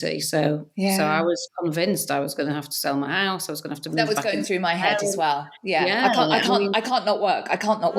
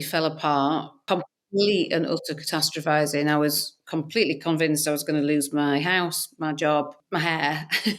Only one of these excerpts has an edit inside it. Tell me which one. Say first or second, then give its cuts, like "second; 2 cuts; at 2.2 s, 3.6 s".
second; 2 cuts; at 1.1 s, 7.0 s